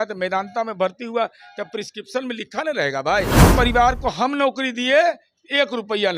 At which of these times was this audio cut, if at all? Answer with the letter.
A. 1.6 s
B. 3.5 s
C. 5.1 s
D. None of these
B